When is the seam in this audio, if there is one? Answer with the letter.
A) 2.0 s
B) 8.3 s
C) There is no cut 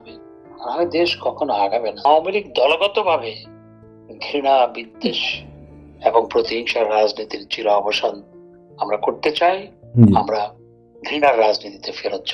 A